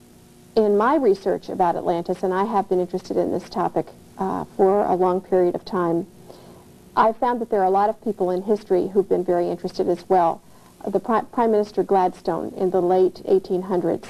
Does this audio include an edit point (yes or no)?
yes